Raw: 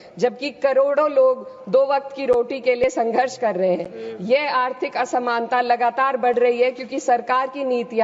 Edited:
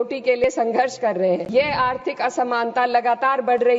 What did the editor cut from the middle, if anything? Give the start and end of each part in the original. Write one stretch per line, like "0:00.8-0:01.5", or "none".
0:03.9-0:04.2